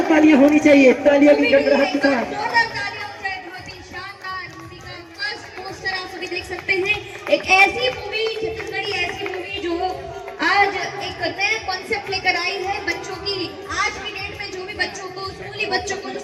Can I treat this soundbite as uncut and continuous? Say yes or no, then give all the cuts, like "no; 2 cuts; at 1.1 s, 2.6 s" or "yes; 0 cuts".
yes; 0 cuts